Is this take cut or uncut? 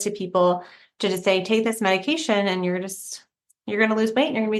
uncut